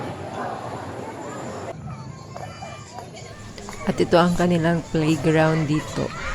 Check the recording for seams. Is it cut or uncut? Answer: cut